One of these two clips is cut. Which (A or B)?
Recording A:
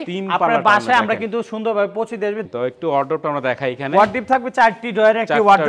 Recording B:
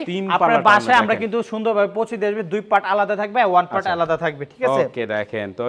A